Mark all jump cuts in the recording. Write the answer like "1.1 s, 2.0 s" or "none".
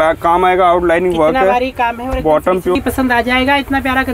2.8 s